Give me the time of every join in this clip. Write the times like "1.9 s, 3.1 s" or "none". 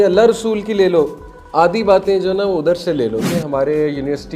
3.3 s